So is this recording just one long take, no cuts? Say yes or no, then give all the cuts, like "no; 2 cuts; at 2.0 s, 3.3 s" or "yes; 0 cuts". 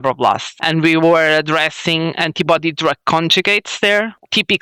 yes; 0 cuts